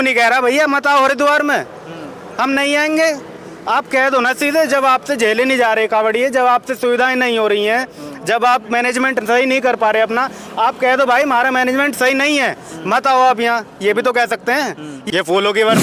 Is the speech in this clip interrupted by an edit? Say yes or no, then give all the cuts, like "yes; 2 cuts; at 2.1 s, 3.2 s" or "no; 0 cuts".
yes; 1 cut; at 14.9 s